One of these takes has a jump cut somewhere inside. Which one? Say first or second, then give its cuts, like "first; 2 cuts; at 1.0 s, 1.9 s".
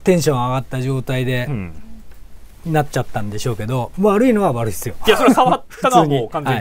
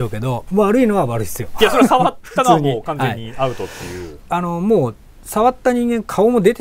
second; 1 cut; at 4.1 s